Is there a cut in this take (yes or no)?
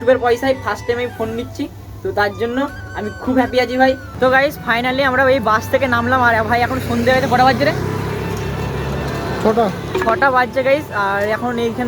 yes